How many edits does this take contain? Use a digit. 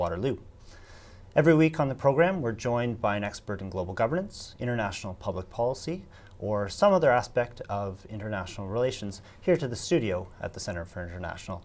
1